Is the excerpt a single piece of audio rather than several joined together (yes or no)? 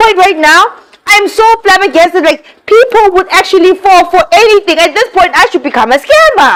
yes